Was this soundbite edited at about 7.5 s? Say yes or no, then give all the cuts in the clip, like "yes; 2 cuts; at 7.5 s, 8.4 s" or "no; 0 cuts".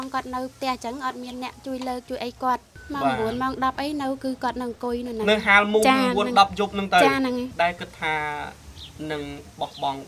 yes; 2 cuts; at 2.8 s, 7.5 s